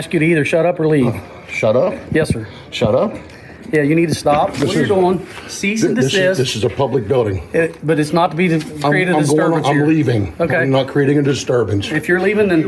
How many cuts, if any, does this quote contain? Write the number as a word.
zero